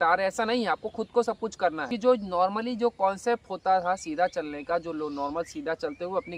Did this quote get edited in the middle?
yes; 1 cut; at 1.9 s

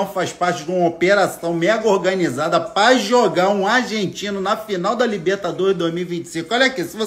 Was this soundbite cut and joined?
no; 0 cuts

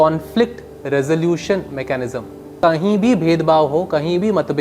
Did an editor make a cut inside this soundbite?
yes; 1 cut; at 2.5 s

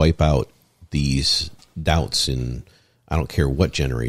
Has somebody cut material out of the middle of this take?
no; 0 cuts

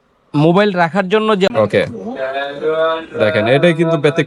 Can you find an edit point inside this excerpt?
yes; 1 cut; at 1.5 s

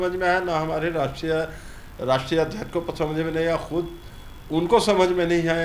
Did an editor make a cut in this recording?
no; 0 cuts

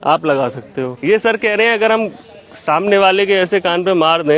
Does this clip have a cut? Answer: yes; 1 cut; at 0.9 s

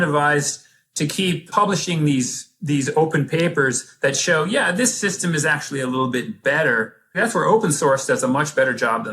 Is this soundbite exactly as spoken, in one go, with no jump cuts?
no; 2 cuts; at 1.5 s, 7.2 s

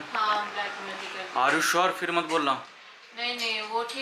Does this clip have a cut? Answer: no; 0 cuts

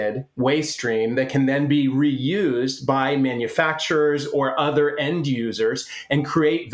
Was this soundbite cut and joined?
no; 0 cuts

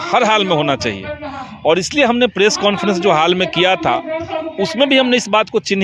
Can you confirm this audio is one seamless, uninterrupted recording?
yes; 0 cuts

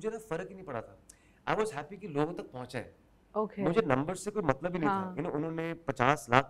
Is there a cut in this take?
no; 0 cuts

